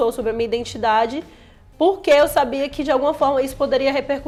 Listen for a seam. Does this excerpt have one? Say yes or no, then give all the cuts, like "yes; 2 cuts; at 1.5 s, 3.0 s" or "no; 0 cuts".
no; 0 cuts